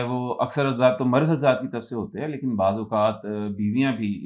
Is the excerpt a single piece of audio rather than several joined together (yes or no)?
yes